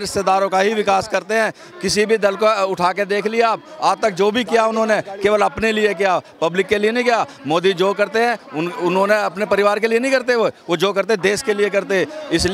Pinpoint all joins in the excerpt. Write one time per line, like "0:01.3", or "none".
none